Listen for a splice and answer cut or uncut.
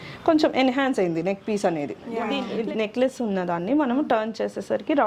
cut